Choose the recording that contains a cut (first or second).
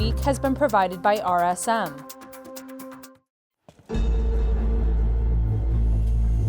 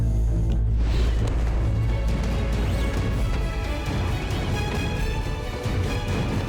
first